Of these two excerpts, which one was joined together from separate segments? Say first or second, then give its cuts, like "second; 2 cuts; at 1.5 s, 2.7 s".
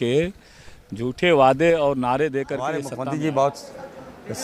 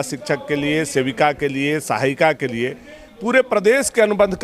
first; 1 cut; at 2.7 s